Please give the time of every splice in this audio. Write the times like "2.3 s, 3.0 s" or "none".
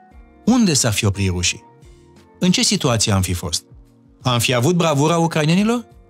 none

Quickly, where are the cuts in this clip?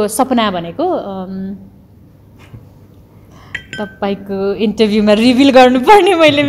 none

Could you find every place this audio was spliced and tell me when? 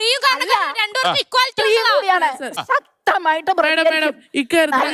2.6 s

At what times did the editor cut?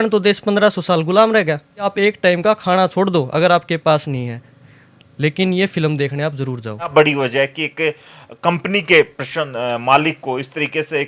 1.8 s, 6.9 s, 9.0 s

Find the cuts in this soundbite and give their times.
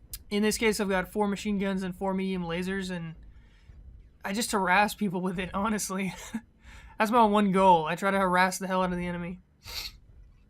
8.8 s

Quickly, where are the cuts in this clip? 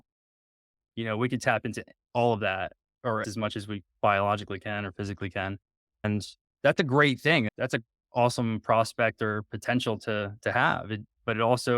3.2 s, 6.0 s, 7.5 s

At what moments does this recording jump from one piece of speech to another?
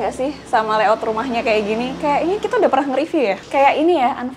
3.4 s

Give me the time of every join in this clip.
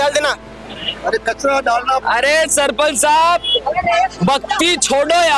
none

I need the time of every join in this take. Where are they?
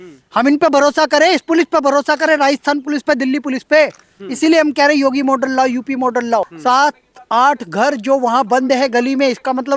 6.5 s

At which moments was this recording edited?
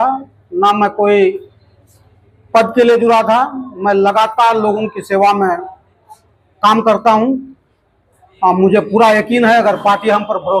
none

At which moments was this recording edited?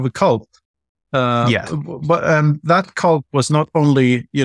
none

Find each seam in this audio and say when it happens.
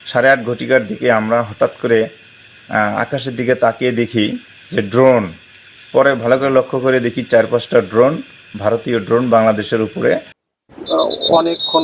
10.4 s

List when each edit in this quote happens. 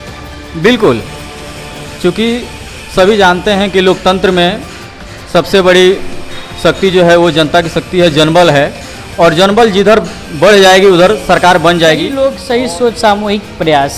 12.1 s

